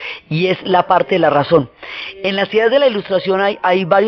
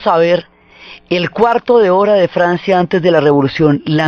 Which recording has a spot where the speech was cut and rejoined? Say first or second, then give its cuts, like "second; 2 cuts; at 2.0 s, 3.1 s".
first; 1 cut; at 1.9 s